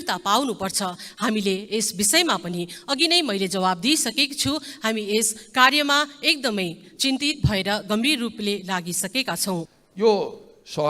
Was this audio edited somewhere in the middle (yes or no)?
yes